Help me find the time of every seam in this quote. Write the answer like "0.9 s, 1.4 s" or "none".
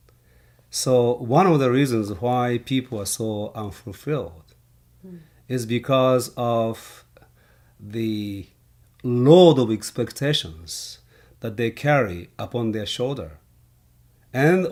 none

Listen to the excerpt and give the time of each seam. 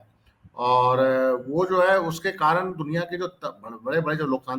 none

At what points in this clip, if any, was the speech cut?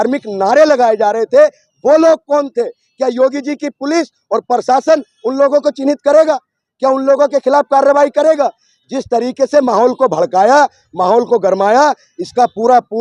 none

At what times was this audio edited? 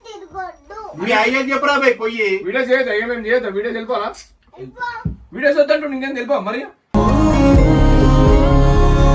none

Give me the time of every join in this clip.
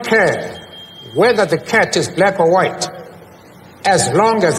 none

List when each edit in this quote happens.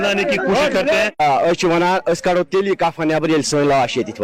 1.1 s

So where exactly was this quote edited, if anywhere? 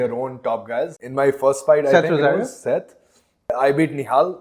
1.0 s, 3.5 s

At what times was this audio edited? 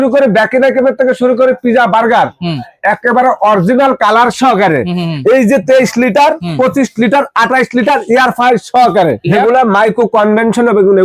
9.3 s

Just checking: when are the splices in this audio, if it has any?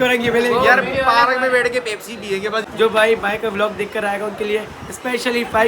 2.6 s

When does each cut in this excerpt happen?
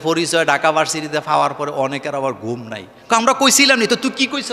none

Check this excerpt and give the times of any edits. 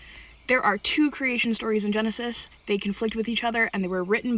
none

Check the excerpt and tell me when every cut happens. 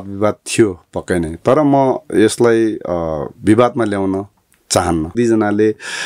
5.1 s

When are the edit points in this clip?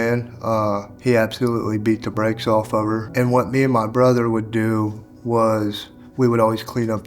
0.9 s, 3.1 s

